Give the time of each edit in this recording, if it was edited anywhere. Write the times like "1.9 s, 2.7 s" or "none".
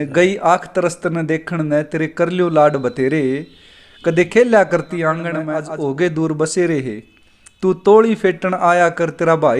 5.5 s